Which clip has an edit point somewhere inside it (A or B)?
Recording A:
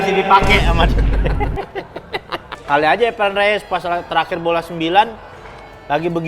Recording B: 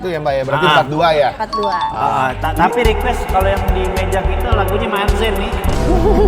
A